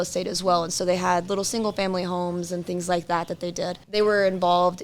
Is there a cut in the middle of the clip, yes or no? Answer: yes